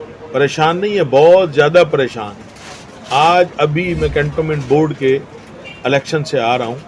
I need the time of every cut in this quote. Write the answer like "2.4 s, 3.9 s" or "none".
none